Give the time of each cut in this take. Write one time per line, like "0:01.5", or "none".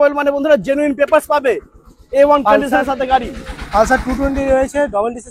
none